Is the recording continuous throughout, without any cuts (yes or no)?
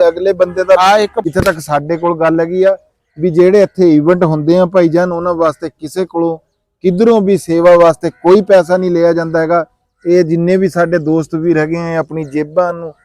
no